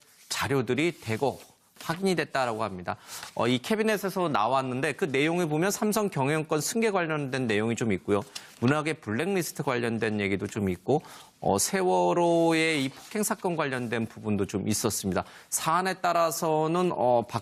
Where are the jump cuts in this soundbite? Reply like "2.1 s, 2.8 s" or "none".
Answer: none